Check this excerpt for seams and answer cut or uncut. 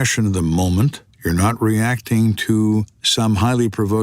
cut